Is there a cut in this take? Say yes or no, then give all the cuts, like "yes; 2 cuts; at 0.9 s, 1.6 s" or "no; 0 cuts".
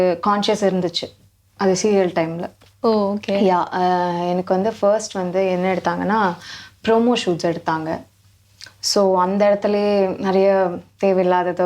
no; 0 cuts